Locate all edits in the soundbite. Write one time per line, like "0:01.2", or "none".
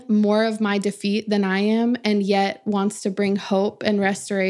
none